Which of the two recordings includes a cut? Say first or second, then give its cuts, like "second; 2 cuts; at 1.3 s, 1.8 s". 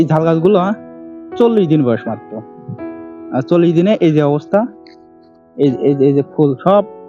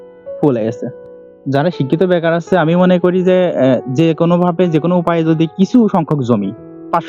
second; 1 cut; at 0.9 s